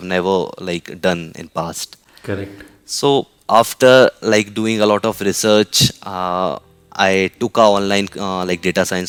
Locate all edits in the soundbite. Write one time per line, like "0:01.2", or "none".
none